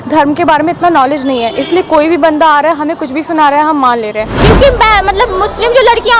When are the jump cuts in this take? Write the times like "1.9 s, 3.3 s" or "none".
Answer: 4.3 s